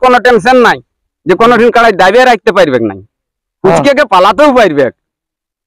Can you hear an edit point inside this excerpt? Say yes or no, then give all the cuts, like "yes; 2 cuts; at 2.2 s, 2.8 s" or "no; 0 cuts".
no; 0 cuts